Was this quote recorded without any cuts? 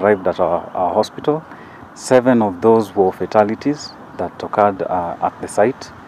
yes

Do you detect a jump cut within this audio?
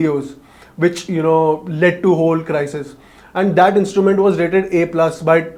no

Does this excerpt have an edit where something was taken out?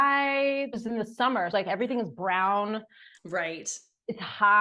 yes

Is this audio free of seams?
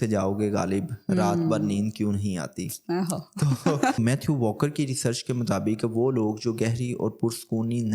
no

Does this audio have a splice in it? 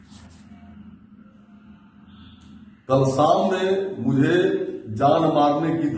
no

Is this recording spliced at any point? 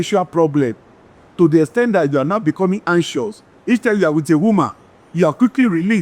no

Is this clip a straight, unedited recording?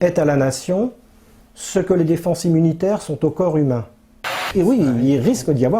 no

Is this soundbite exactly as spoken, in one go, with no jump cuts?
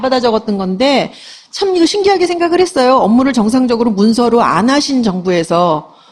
yes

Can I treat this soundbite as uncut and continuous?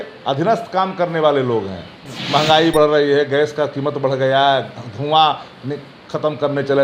yes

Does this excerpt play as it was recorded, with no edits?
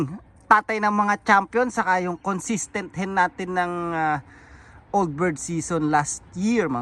yes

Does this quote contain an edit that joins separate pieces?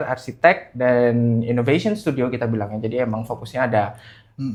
no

